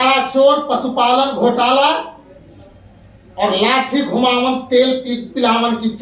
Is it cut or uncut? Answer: uncut